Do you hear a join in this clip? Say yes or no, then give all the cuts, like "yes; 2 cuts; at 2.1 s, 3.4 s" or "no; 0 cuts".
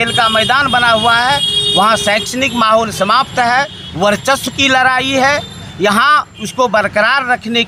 no; 0 cuts